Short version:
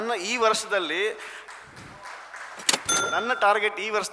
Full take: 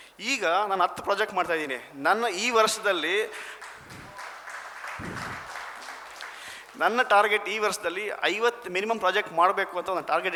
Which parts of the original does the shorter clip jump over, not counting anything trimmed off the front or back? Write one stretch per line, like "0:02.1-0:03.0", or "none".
0:05.1-0:06.6